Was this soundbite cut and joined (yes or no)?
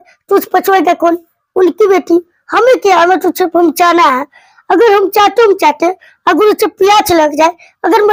no